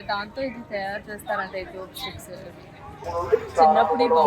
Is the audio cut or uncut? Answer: cut